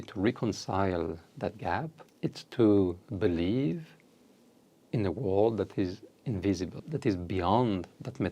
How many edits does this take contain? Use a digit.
2